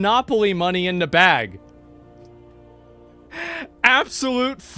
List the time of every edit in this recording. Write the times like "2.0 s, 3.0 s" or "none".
3.3 s